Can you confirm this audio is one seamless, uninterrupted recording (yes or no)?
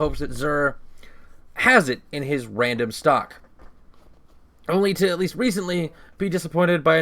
no